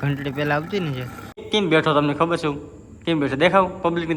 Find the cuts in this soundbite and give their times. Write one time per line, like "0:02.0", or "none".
0:01.4

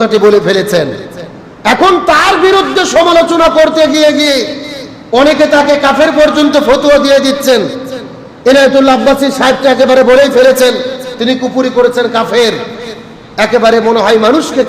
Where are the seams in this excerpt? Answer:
none

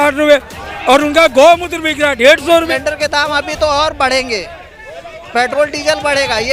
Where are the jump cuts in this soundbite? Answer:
0:02.6

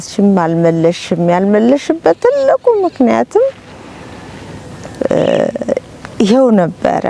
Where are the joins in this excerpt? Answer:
none

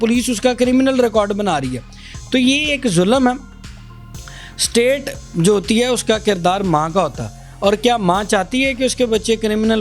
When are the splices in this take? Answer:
none

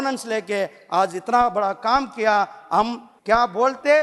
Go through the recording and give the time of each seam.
0:03.1

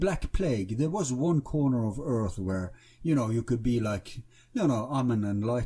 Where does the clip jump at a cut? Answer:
none

